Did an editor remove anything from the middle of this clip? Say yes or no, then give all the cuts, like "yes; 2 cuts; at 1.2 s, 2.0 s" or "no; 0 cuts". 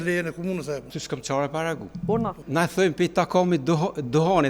yes; 2 cuts; at 0.9 s, 2.4 s